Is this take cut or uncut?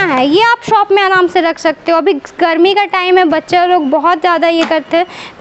uncut